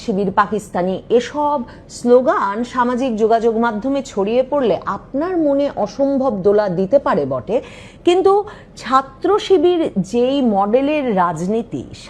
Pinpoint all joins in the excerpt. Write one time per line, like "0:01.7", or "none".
none